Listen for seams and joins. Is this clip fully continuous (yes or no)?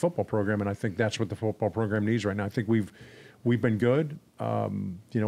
yes